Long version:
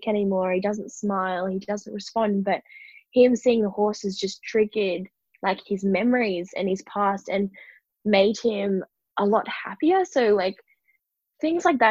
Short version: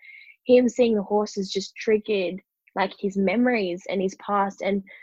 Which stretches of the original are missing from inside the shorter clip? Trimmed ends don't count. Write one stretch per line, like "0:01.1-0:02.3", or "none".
none